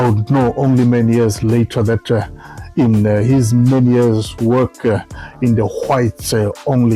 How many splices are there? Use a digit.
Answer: 0